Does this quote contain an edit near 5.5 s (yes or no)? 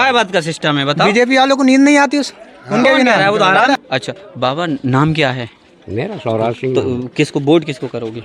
no